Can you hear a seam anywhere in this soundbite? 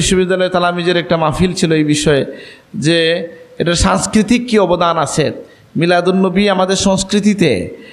no; 0 cuts

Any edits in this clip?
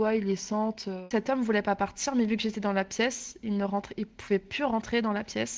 yes; 1 cut; at 1.1 s

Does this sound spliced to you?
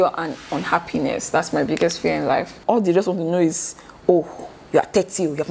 yes; 1 cut; at 2.5 s

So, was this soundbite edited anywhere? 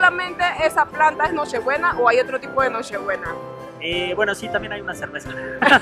no; 0 cuts

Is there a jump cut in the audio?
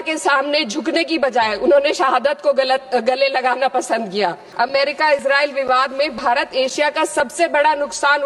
yes; 1 cut; at 4.4 s

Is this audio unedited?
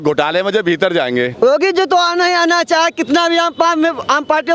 no; 1 cut; at 1.3 s

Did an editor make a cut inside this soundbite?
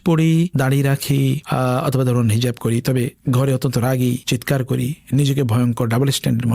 no; 0 cuts

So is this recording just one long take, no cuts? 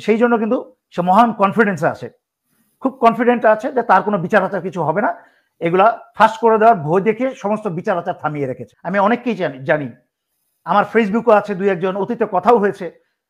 no; 1 cut; at 8.7 s

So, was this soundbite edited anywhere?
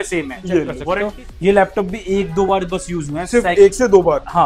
yes; 1 cut; at 1.0 s

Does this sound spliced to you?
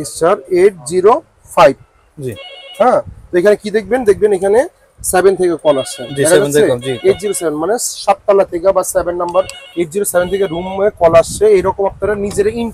no; 0 cuts

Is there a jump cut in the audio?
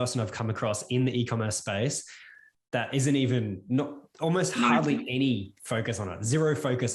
no; 0 cuts

